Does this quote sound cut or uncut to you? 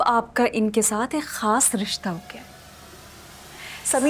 uncut